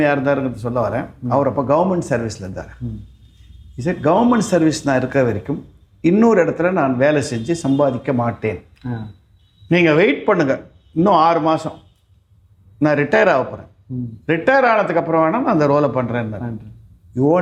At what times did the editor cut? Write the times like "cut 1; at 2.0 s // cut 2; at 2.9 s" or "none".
none